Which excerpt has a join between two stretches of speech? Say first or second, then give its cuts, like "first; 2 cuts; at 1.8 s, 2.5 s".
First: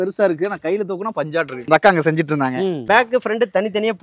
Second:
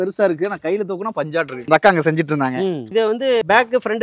first; 1 cut; at 2.8 s